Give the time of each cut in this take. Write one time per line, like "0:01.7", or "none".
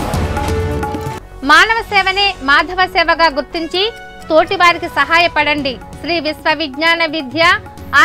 0:01.1

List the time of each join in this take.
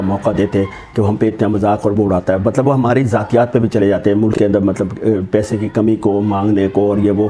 none

